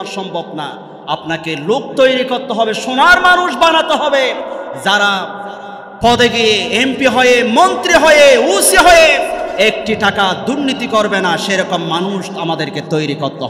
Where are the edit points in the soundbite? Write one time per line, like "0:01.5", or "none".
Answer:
none